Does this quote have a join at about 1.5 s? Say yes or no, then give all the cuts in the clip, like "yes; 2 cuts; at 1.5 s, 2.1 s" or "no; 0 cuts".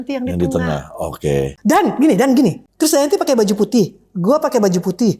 yes; 2 cuts; at 1.5 s, 2.6 s